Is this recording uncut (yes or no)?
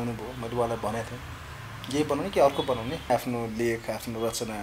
no